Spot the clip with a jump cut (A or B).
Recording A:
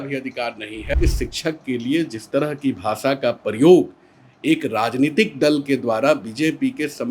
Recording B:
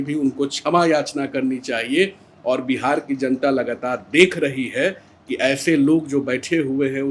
A